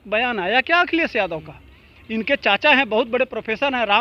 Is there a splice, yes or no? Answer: no